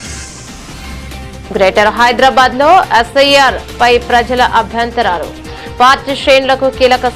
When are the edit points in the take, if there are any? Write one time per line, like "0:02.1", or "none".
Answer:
none